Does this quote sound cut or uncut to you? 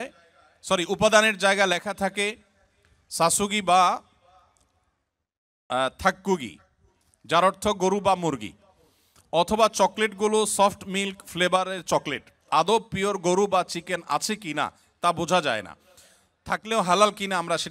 uncut